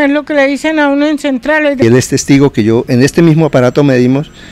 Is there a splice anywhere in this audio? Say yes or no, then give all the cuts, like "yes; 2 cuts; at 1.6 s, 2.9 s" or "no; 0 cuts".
yes; 1 cut; at 1.8 s